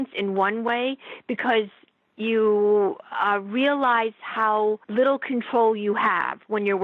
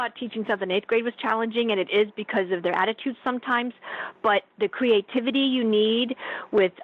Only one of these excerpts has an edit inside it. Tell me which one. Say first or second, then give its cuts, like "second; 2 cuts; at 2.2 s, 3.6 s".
first; 1 cut; at 4.8 s